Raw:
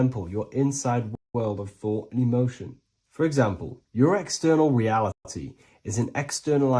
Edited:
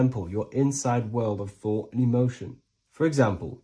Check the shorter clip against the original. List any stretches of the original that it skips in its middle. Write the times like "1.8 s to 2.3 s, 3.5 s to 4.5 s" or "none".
1.1 s to 1.3 s